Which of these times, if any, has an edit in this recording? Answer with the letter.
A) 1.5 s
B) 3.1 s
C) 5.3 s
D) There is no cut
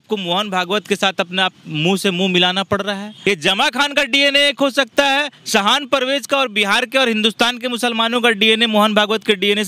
B